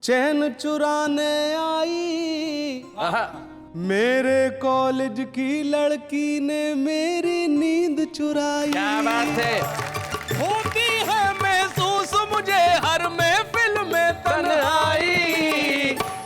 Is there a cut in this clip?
yes; 1 cut; at 9.7 s

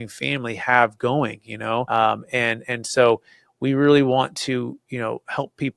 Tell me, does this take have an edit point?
yes; 1 cut; at 1.9 s

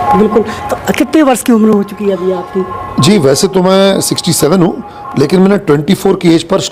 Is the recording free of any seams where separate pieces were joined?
yes; 0 cuts

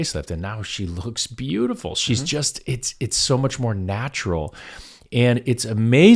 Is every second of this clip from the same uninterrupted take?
yes; 0 cuts

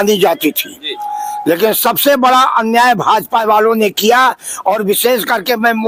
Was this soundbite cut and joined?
no; 0 cuts

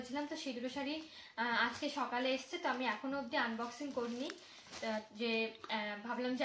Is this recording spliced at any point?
no; 0 cuts

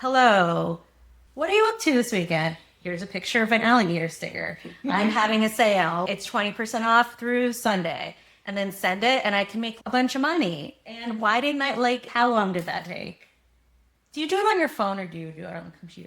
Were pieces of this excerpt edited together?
yes; 1 cut; at 6.0 s

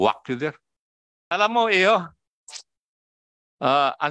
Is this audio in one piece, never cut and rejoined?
no; 1 cut; at 1.3 s

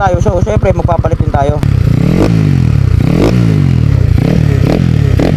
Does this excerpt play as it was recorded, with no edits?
no; 1 cut; at 1.6 s

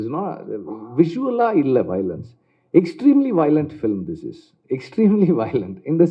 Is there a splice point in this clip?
no; 0 cuts

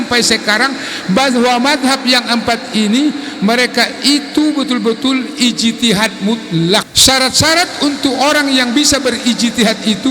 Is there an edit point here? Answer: yes; 1 cut; at 6.9 s

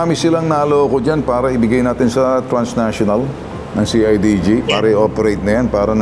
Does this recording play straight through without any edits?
yes; 0 cuts

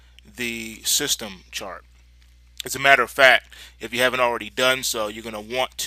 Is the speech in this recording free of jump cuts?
yes; 0 cuts

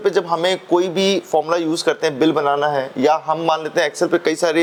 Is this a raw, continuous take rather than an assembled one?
yes; 0 cuts

